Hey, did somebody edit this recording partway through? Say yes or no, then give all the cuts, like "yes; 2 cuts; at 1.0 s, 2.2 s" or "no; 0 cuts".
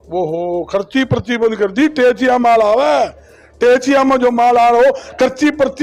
no; 0 cuts